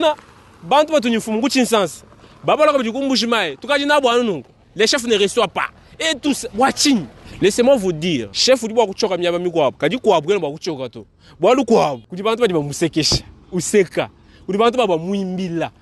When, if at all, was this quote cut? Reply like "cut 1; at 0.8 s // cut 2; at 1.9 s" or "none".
cut 1; at 7.2 s // cut 2; at 8.3 s // cut 3; at 12.1 s